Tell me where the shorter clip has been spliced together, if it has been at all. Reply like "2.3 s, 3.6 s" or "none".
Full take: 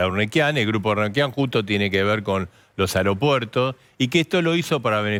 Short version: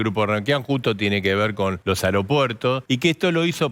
1.8 s, 2.8 s